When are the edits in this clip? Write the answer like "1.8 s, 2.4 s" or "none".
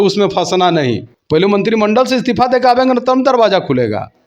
1.1 s